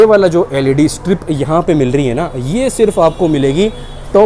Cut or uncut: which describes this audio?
uncut